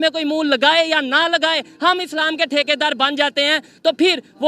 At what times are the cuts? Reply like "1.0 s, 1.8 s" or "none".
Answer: none